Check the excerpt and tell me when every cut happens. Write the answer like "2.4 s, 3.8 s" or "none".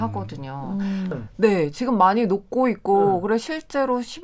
1.1 s